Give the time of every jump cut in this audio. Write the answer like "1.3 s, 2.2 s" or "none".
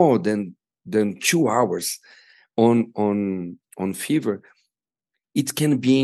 none